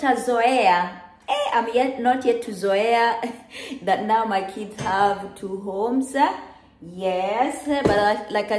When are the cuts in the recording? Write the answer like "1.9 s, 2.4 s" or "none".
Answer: none